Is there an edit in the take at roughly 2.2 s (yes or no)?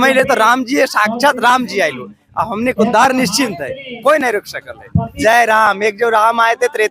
no